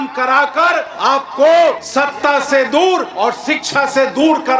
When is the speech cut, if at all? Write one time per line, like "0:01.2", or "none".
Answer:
0:00.9
0:01.8
0:03.1